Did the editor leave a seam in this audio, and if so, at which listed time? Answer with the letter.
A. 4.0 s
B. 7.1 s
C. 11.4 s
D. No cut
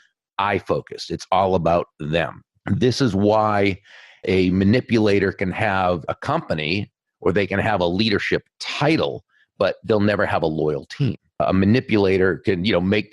C